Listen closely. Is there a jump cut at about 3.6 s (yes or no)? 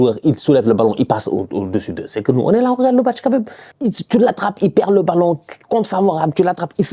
yes